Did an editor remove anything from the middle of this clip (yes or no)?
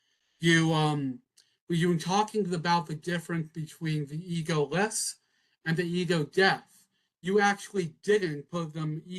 no